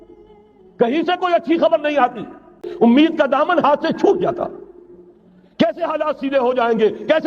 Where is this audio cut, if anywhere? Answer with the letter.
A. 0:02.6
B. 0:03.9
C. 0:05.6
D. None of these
A